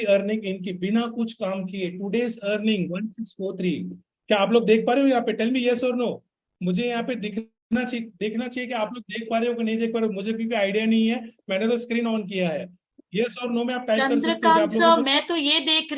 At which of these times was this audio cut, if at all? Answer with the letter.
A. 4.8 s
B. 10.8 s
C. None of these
C